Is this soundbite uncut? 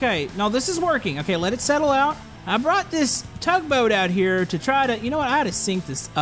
no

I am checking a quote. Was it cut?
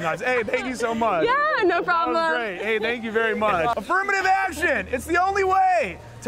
yes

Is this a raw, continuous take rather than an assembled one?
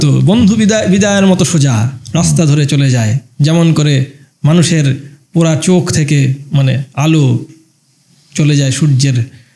yes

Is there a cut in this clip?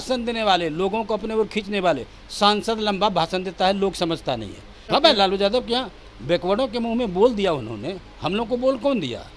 yes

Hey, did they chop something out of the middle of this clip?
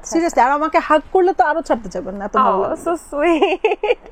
no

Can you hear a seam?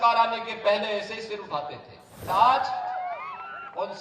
yes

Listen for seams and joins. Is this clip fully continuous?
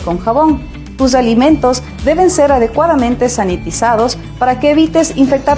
yes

